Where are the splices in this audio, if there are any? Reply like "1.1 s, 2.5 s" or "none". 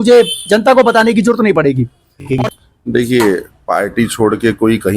2.3 s